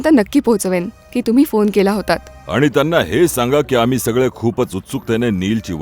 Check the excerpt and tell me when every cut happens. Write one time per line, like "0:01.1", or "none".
0:02.3